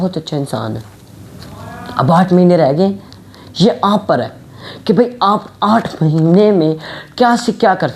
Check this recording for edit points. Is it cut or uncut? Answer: uncut